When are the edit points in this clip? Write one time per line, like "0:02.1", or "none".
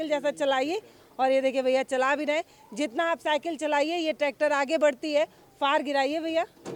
none